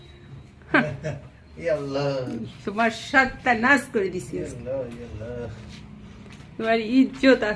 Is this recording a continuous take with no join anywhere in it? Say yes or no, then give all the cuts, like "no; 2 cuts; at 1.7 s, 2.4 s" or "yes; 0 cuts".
yes; 0 cuts